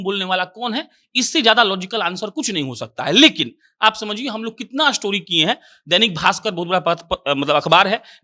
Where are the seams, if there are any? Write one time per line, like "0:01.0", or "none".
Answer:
none

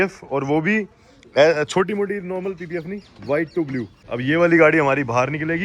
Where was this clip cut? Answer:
0:04.0

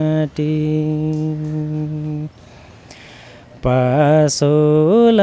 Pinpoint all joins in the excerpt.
none

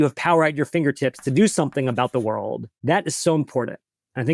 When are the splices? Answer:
0:02.7

